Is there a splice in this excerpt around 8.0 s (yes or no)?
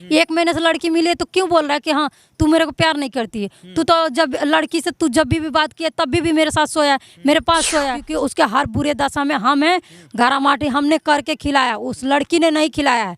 yes